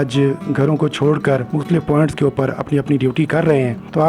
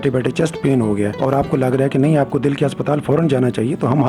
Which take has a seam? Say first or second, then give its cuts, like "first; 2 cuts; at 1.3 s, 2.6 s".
first; 1 cut; at 1.4 s